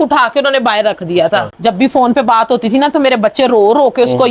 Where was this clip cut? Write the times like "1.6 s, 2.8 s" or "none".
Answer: 1.5 s